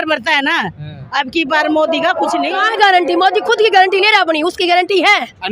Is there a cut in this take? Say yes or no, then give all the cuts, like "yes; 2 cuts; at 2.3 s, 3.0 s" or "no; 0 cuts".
yes; 1 cut; at 2.6 s